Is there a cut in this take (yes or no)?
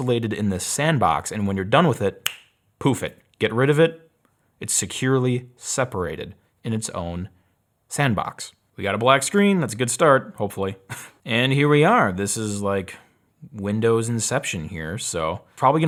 no